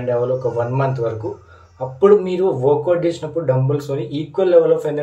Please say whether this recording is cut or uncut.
uncut